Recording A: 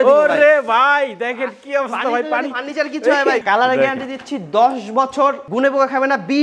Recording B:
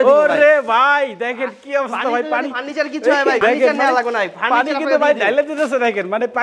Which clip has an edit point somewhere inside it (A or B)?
A